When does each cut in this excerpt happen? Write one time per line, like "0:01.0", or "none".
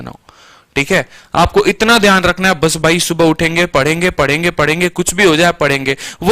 none

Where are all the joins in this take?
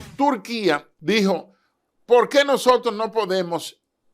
0:00.9

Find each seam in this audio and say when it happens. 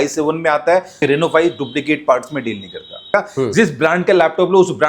0:01.0
0:03.1

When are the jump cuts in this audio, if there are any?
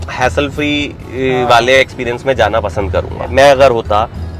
0:03.3

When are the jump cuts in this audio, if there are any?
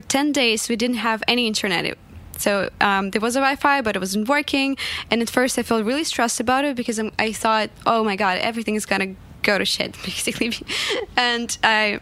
none

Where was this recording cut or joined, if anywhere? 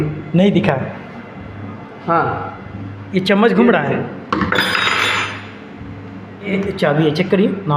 0:06.5

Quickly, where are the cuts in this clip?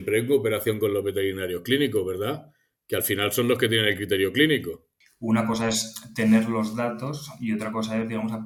none

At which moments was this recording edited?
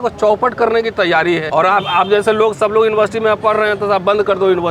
0:01.4

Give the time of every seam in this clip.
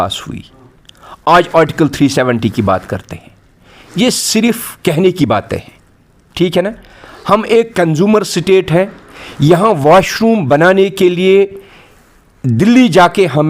none

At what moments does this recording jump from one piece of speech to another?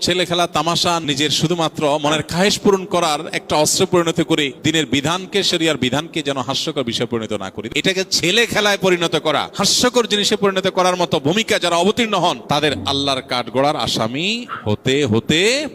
0:01.0
0:04.5
0:07.5
0:09.5
0:12.4

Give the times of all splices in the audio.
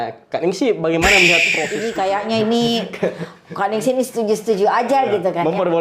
0:01.6

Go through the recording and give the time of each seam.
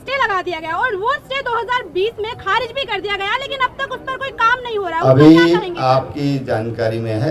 none

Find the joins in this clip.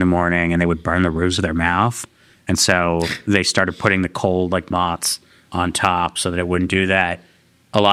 none

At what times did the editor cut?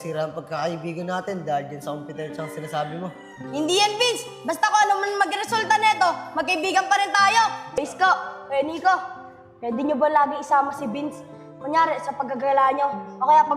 0:07.8

